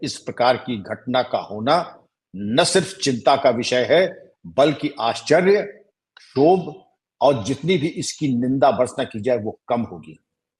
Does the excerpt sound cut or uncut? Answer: uncut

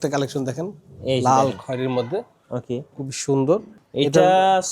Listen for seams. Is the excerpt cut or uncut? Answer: cut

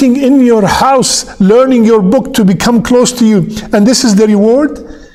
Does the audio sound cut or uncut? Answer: uncut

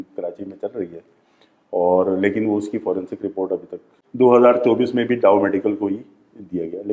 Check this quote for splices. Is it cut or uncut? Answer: cut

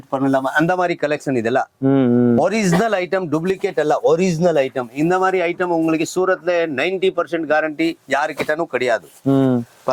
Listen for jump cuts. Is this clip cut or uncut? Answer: uncut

